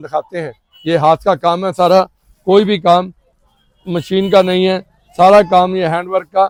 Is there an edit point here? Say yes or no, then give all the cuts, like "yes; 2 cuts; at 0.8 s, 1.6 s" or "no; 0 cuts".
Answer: no; 0 cuts